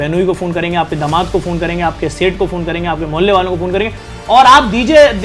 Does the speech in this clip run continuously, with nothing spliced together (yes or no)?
no